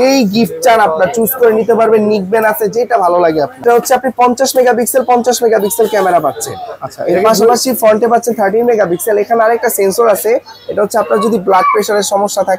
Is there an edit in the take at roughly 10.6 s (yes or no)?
no